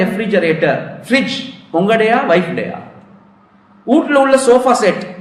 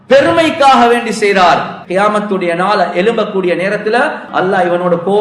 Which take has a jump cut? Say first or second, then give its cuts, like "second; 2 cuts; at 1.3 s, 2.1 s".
second; 2 cuts; at 1.7 s, 4.2 s